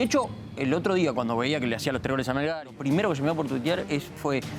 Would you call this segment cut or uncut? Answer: cut